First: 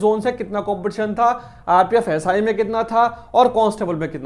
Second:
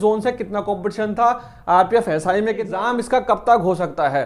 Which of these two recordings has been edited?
second; 1 cut; at 2.7 s

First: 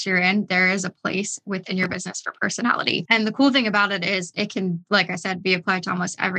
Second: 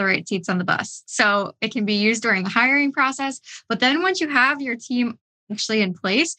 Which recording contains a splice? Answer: first; 1 cut; at 3.0 s

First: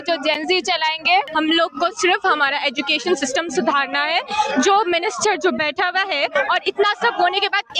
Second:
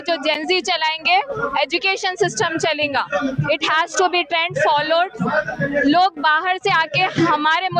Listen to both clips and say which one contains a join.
first; 1 cut; at 1.3 s

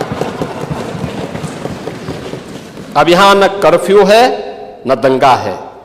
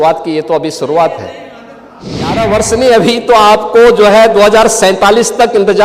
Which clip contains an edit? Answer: second; 1 cut; at 2.3 s

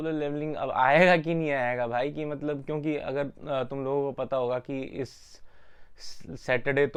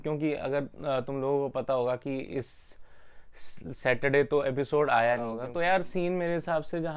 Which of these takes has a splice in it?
second; 1 cut; at 5.4 s

